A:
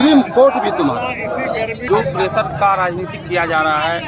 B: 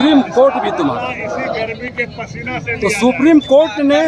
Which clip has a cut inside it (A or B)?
A